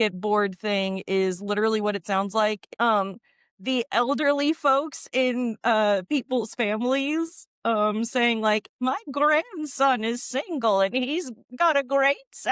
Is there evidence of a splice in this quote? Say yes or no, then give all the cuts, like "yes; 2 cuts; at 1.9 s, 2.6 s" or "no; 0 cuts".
no; 0 cuts